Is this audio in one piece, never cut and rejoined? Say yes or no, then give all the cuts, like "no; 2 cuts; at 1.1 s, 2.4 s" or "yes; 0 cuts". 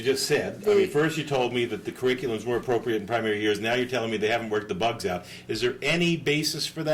yes; 0 cuts